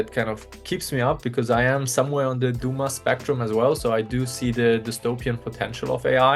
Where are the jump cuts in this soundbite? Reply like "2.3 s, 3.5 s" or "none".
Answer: none